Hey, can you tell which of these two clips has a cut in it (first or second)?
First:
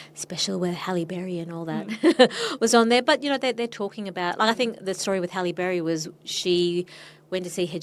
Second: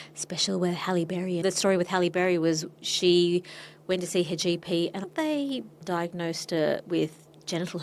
second